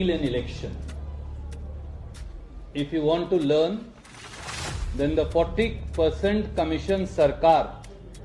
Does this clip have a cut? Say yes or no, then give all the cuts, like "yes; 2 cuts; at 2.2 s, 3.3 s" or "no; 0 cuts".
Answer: no; 0 cuts